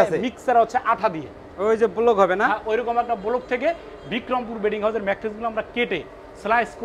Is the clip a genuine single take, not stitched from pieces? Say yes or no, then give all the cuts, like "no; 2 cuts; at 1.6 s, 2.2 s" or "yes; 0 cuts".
no; 1 cut; at 1.5 s